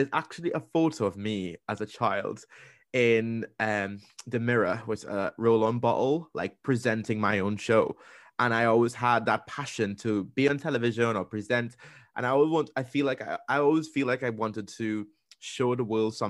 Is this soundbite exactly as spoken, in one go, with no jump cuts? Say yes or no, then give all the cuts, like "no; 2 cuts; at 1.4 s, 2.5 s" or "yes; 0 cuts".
yes; 0 cuts